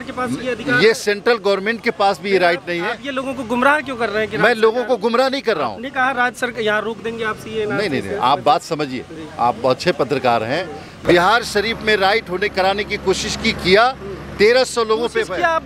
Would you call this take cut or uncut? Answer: cut